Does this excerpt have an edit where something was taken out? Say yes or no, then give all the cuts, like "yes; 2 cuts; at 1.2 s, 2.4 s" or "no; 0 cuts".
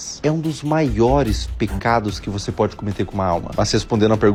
no; 0 cuts